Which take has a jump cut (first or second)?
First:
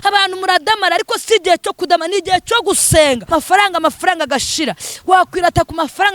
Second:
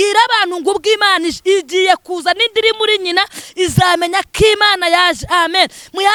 first